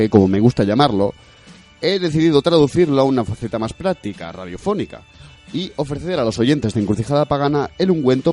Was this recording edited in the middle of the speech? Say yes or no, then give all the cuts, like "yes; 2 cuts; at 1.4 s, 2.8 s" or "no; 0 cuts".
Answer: no; 0 cuts